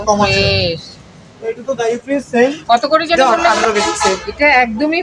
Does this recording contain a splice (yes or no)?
yes